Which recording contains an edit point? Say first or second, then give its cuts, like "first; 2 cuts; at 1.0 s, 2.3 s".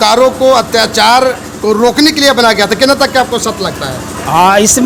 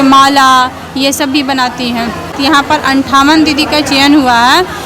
second; 1 cut; at 2.3 s